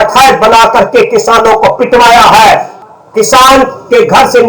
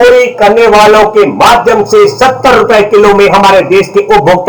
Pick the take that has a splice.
first; 1 cut; at 2.7 s

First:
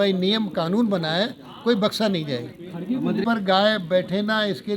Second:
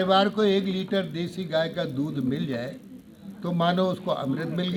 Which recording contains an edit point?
first; 1 cut; at 3.2 s

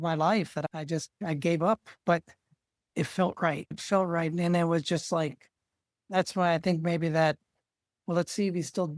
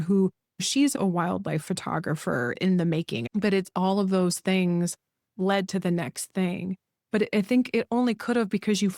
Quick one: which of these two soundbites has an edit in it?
second; 1 cut; at 3.2 s

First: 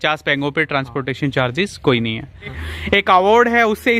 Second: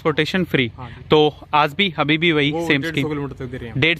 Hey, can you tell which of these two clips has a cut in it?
first; 1 cut; at 2.6 s

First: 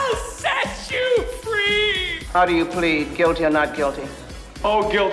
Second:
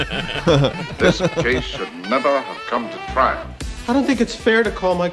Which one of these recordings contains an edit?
second; 1 cut; at 1.4 s

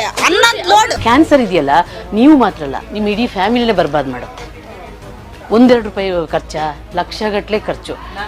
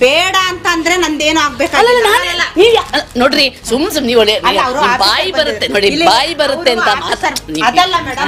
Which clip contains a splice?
first; 1 cut; at 0.9 s

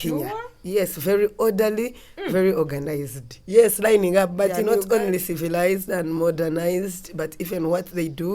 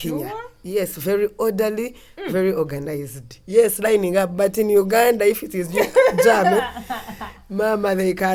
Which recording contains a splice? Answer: first; 1 cut; at 4.6 s

